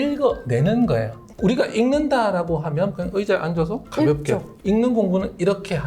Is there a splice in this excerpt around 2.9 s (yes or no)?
yes